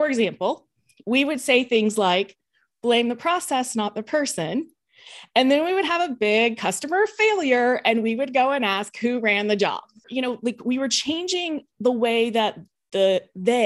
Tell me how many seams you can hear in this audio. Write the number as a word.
one